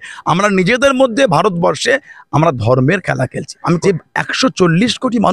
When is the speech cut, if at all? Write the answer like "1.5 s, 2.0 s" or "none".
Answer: 3.8 s